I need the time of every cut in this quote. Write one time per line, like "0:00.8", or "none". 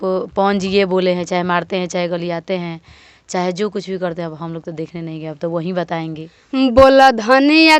0:06.3

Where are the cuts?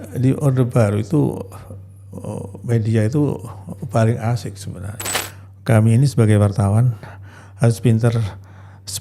0:05.0

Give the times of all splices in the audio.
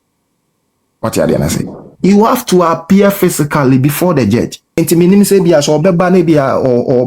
0:04.6

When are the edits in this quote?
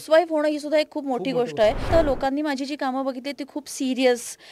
0:01.9

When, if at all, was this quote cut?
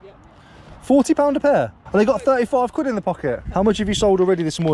0:01.8
0:03.4

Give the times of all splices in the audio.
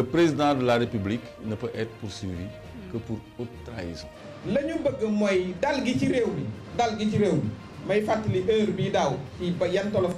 0:04.3

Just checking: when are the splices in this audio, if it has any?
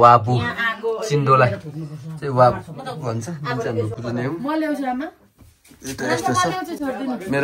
none

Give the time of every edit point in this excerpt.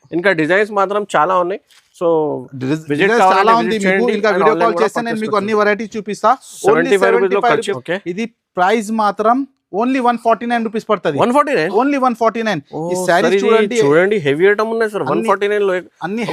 0:07.7

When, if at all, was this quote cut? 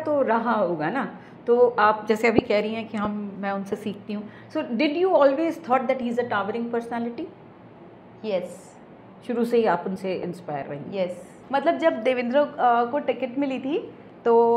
0:11.4

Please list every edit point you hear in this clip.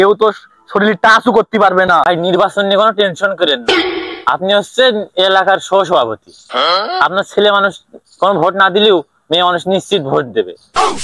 0:02.1

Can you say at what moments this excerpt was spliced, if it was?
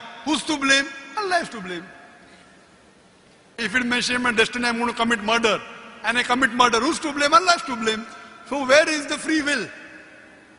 0:02.7

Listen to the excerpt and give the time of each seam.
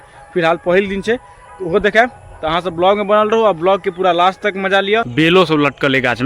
0:05.1

